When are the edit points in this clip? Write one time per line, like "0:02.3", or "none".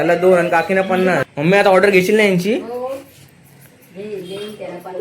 0:01.3